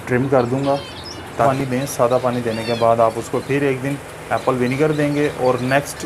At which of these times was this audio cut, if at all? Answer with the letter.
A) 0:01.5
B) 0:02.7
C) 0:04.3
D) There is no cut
A